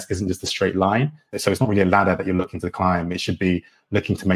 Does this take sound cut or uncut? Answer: uncut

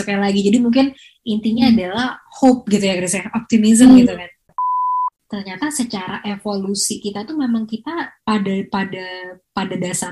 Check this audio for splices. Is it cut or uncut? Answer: cut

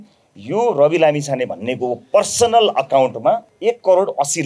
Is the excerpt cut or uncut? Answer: cut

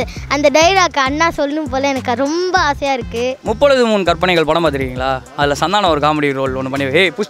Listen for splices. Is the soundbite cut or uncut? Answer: uncut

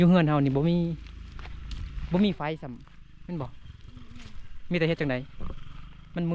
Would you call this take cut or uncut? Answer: uncut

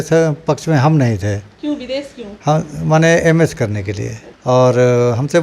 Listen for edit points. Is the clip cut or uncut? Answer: cut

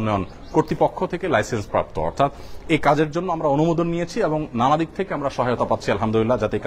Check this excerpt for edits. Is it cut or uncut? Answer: uncut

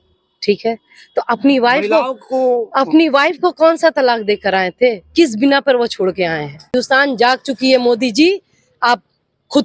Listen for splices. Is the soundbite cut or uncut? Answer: cut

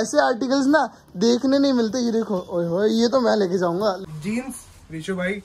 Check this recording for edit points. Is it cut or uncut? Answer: cut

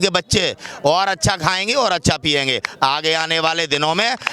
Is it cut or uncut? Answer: uncut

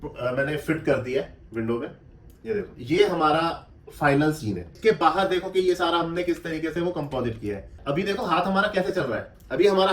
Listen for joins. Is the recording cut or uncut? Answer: cut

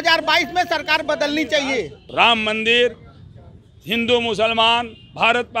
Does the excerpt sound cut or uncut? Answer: cut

